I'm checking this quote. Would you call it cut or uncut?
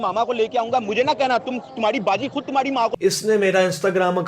cut